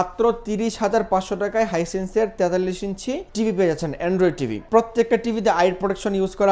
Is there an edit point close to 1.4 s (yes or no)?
no